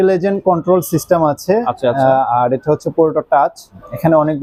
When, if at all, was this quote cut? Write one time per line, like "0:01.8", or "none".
none